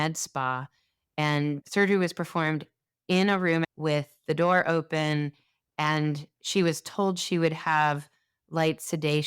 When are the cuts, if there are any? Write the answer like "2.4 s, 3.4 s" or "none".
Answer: 1.6 s, 3.7 s